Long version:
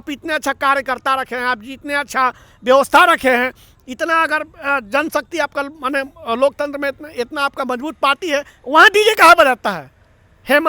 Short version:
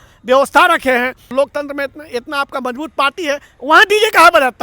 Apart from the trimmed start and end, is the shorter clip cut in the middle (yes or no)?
yes